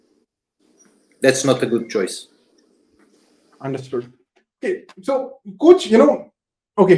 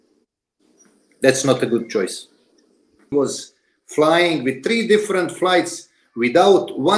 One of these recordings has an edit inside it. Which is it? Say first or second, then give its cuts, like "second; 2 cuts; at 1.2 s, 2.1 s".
second; 1 cut; at 3.1 s